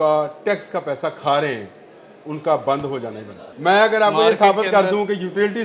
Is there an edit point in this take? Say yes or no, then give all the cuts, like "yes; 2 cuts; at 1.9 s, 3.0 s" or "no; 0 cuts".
yes; 1 cut; at 3.5 s